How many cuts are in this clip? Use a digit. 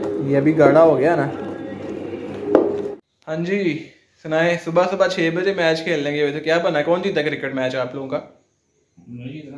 1